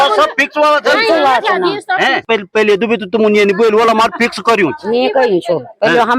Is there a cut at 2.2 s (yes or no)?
yes